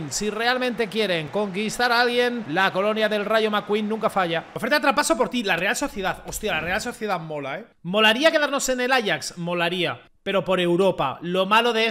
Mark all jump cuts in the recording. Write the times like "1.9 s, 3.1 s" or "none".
4.5 s, 7.7 s